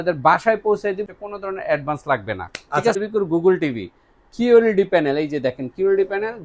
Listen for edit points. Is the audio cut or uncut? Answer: cut